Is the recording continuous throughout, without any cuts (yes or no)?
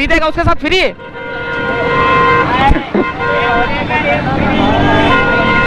yes